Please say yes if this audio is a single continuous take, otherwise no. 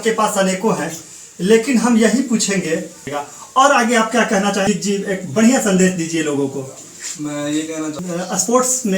no